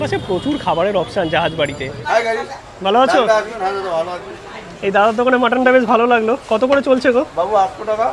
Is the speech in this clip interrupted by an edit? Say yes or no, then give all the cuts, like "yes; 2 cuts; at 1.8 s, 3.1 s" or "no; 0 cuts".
yes; 1 cut; at 1.8 s